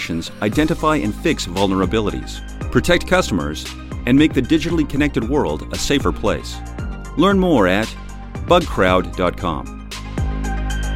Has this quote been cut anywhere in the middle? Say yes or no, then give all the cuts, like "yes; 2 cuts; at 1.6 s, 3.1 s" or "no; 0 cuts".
yes; 1 cut; at 9.9 s